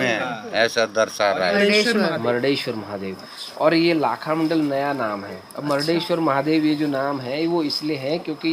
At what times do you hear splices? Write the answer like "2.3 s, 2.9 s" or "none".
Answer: 1.5 s